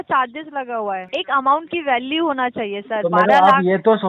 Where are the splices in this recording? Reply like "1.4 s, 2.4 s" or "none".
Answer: 1.1 s